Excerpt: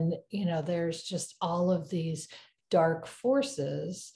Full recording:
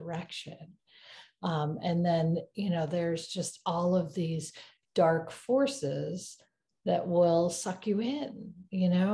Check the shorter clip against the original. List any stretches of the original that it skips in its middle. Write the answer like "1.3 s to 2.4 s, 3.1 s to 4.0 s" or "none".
none